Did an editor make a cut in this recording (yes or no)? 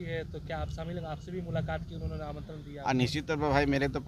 no